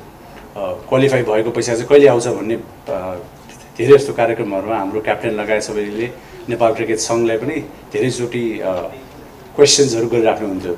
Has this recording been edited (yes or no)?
no